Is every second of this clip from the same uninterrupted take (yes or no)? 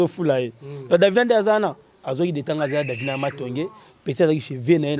yes